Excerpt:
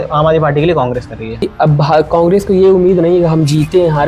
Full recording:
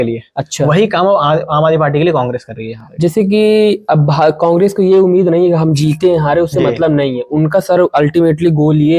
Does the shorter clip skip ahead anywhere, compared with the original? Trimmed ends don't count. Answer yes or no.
yes